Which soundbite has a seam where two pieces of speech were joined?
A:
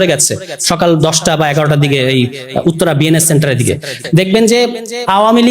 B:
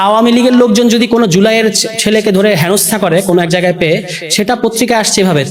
A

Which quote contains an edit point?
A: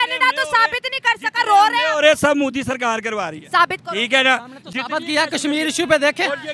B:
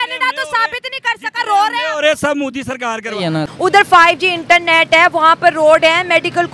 B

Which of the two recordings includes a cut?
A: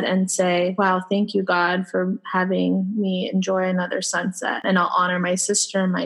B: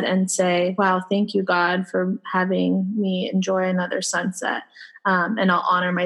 A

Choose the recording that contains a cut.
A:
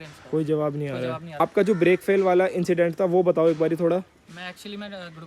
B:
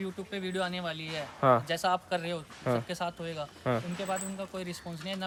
A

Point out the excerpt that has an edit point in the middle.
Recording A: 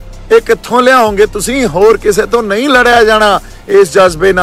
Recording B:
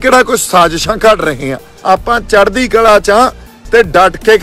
B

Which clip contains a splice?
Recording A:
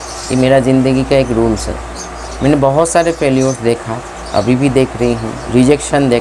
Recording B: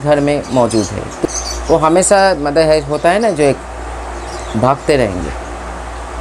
B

